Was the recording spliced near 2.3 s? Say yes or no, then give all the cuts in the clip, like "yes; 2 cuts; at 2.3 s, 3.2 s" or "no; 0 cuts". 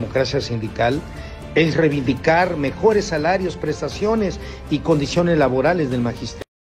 no; 2 cuts; at 4.1 s, 5.2 s